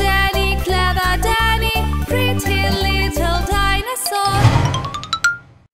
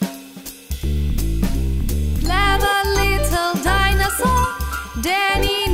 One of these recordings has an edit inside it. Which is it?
first; 1 cut; at 4.4 s

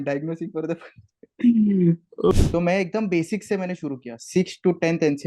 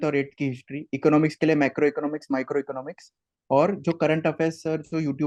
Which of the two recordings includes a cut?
first; 1 cut; at 2.3 s

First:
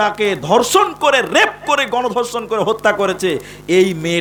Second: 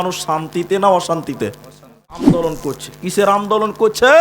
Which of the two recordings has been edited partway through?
second; 1 cut; at 2.3 s

